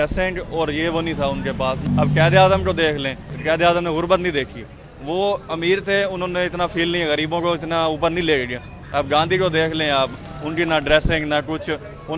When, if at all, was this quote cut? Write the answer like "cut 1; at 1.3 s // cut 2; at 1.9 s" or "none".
cut 1; at 1.8 s // cut 2; at 3.3 s

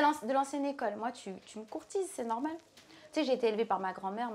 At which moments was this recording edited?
none

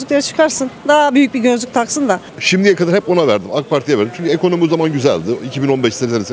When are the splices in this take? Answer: cut 1; at 2.3 s

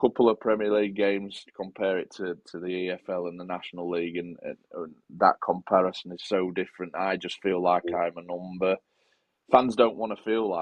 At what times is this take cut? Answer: none

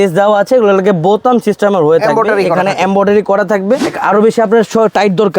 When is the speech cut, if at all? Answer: cut 1; at 3.9 s

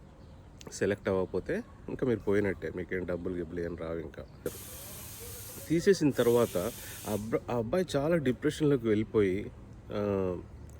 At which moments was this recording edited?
cut 1; at 4.5 s

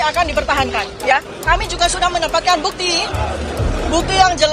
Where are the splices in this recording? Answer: cut 1; at 1.3 s

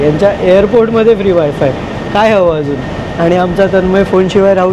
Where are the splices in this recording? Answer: none

